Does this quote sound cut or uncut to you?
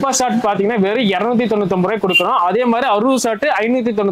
uncut